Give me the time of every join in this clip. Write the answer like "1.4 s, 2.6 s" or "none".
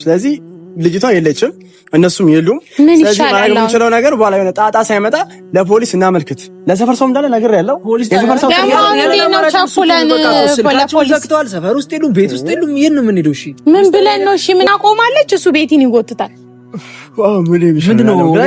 14.7 s